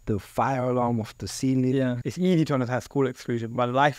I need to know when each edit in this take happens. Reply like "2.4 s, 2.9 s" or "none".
2.1 s